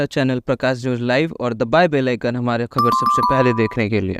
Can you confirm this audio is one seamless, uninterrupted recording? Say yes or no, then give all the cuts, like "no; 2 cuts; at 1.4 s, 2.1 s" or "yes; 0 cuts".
yes; 0 cuts